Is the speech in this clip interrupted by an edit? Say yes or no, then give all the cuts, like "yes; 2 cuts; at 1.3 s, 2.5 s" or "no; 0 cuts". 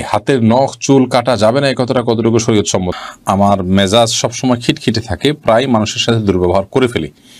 yes; 1 cut; at 2.9 s